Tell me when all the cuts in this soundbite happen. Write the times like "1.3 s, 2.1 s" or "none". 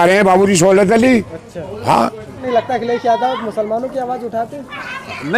2.4 s